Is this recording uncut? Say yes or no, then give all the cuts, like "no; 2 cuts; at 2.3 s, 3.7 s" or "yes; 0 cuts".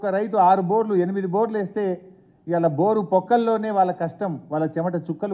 yes; 0 cuts